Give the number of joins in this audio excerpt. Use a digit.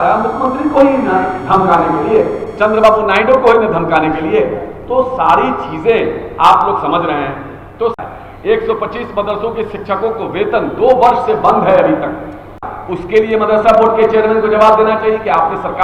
2